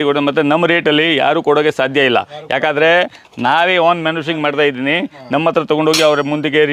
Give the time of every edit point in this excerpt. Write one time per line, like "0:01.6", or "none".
none